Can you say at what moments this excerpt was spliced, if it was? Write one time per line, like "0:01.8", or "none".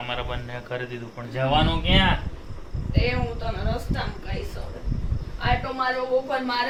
none

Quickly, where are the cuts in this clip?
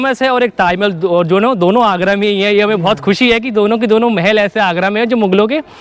none

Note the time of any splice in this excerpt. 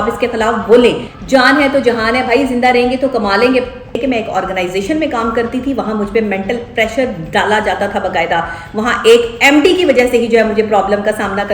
0:01.1
0:04.0

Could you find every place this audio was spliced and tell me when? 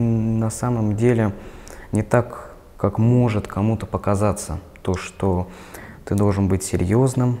none

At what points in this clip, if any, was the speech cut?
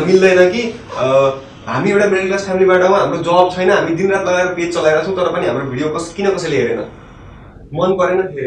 none

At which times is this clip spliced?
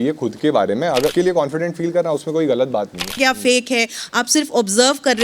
0:01.1
0:03.2

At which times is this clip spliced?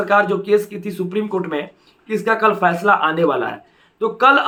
none

